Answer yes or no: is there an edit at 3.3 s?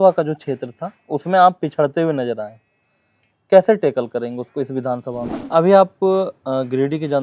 no